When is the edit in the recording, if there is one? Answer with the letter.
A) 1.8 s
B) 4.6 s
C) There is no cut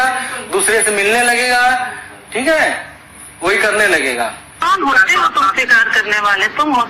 B